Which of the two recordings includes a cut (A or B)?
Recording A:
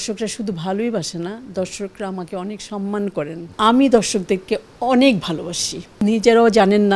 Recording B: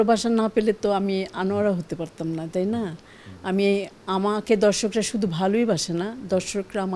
A